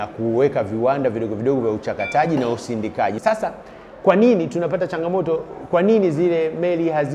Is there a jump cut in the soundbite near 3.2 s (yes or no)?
yes